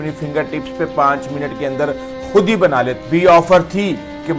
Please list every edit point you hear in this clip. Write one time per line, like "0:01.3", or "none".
0:02.9